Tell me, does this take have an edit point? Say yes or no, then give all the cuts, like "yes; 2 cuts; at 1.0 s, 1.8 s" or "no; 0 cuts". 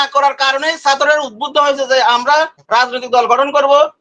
no; 0 cuts